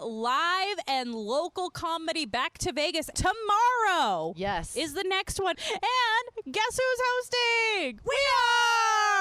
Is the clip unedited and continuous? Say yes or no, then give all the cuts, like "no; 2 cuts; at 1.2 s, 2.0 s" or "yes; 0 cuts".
no; 3 cuts; at 3.1 s, 5.6 s, 7.9 s